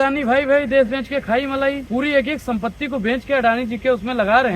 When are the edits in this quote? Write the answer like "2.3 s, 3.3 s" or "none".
1.8 s